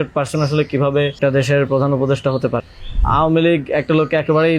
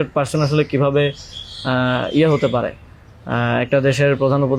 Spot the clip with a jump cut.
first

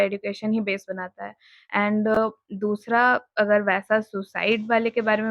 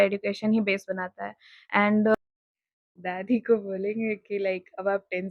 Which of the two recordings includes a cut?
second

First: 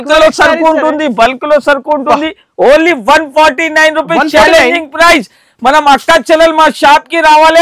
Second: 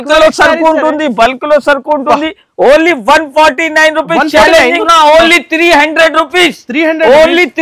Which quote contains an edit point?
second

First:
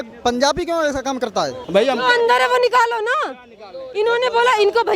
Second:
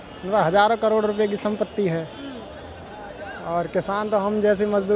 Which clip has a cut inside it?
first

